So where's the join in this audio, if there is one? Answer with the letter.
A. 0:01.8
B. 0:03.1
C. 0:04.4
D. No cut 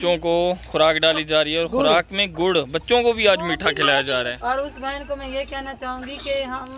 C